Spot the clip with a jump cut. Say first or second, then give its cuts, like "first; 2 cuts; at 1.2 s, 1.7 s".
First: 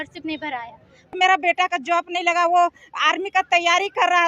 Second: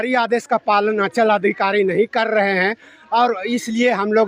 first; 1 cut; at 1.1 s